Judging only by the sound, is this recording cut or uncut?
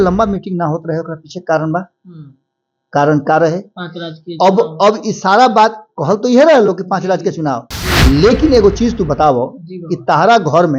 uncut